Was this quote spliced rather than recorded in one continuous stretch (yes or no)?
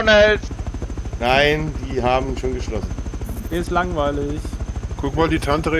no